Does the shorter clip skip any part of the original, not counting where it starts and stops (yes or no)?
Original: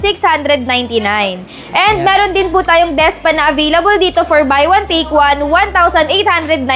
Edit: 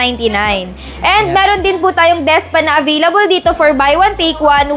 no